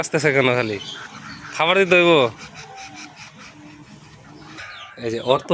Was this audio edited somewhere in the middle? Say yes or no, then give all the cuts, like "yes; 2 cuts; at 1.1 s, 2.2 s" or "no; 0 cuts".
yes; 1 cut; at 4.6 s